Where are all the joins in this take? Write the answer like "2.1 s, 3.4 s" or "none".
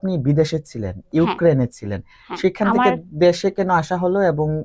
none

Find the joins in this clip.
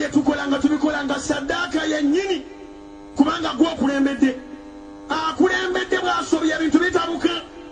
none

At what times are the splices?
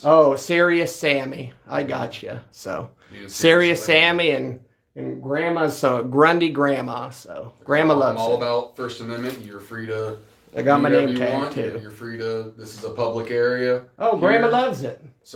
none

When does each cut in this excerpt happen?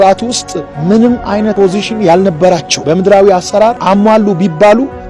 1.5 s, 2.7 s, 3.8 s

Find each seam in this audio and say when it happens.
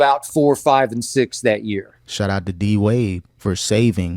2.0 s

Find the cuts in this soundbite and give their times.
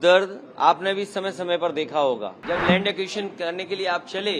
2.4 s

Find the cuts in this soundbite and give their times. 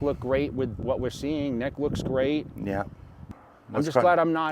3.3 s

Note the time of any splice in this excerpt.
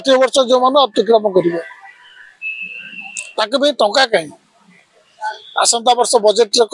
none

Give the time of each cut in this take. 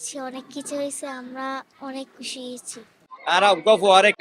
3.1 s

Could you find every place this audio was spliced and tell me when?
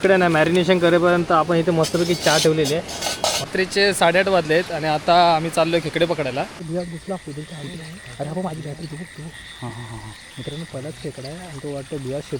3.5 s, 6.6 s

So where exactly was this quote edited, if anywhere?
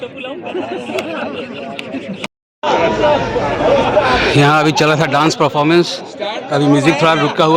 2.3 s

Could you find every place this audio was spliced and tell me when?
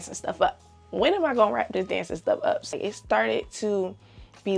2.7 s

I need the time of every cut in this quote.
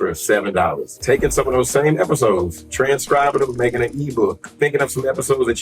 0.9 s, 2.6 s, 4.5 s

